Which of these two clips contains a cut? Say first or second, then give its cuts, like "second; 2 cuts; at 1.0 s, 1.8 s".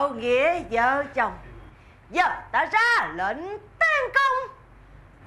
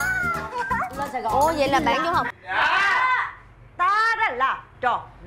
second; 1 cut; at 2.4 s